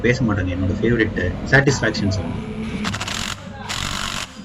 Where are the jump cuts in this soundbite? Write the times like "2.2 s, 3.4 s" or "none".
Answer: none